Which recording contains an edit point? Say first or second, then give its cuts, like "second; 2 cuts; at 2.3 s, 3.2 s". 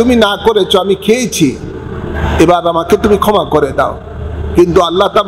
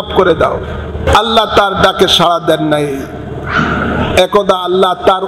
second; 1 cut; at 1.0 s